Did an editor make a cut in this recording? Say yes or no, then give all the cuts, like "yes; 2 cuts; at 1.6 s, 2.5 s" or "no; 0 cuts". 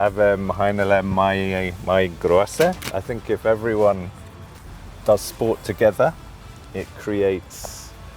yes; 1 cut; at 2.8 s